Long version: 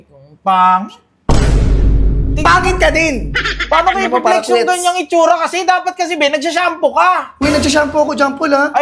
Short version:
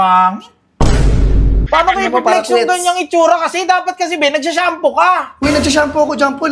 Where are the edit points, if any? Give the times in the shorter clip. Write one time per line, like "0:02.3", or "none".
0:01.5